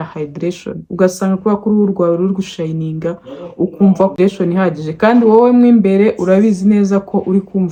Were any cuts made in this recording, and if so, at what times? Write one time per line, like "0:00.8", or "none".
none

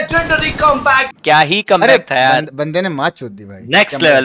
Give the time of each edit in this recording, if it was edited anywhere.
0:01.1

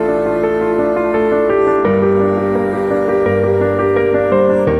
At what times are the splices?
none

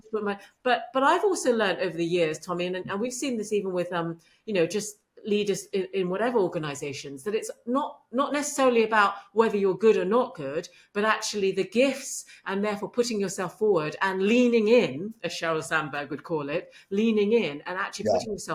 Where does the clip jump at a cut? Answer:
none

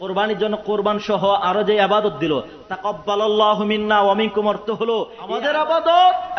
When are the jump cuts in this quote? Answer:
0:05.2

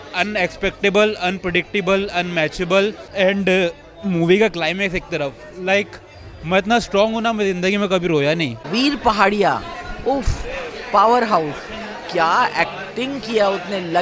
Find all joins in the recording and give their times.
0:03.0
0:08.7

